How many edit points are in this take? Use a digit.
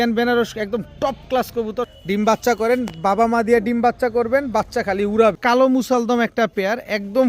2